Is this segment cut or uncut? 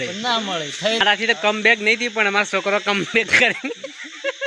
cut